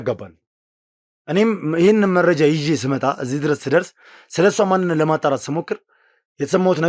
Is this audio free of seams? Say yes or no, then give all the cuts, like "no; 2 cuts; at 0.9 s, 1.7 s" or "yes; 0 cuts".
yes; 0 cuts